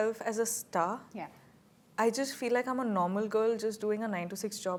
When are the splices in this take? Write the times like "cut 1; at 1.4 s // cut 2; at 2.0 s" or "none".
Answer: none